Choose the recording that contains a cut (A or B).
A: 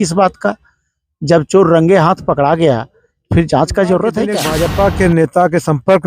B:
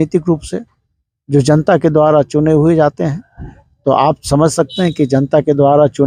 A